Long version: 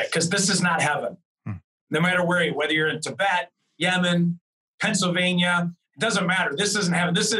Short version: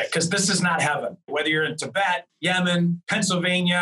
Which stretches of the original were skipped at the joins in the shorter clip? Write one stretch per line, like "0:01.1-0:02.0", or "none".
0:01.3-0:02.5
0:03.5-0:03.7
0:04.4-0:04.8